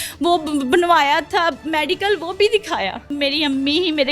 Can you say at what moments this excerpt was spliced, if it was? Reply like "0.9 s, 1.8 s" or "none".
3.1 s